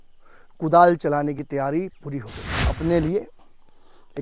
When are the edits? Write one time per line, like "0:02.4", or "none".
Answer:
0:02.7